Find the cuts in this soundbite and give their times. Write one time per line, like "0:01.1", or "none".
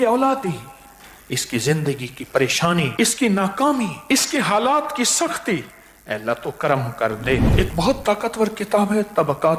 0:02.9
0:04.0
0:07.5